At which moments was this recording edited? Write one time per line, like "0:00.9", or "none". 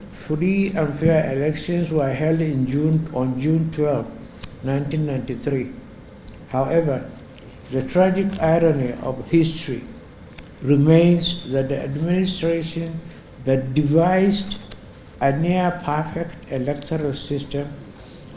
none